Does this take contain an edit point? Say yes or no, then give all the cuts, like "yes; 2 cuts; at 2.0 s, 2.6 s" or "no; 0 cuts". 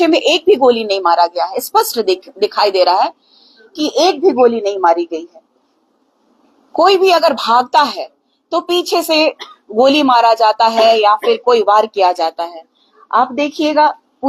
no; 0 cuts